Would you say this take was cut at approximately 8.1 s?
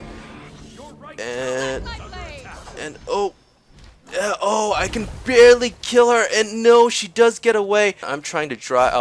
yes; 1 cut; at 8.1 s

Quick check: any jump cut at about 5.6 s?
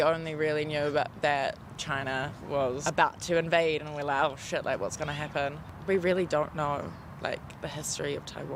no; 0 cuts

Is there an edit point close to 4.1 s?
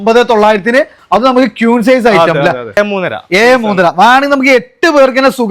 no; 1 cut; at 2.8 s

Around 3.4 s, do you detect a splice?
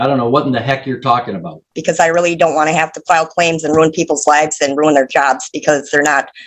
no; 1 cut; at 1.7 s

